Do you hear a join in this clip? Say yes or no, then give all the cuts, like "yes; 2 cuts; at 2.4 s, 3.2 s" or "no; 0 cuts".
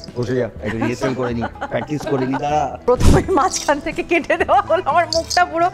yes; 1 cut; at 2.8 s